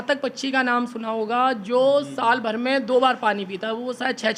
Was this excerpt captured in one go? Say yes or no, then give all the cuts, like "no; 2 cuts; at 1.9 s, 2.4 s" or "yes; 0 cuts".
yes; 0 cuts